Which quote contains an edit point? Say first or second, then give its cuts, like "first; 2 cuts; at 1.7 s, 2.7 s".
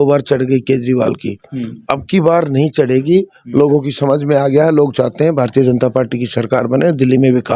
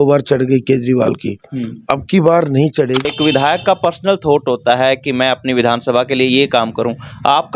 second; 1 cut; at 3.0 s